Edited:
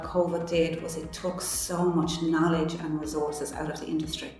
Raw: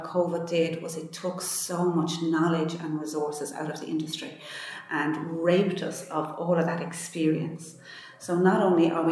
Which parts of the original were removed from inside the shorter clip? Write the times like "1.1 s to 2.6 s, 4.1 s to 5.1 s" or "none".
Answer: none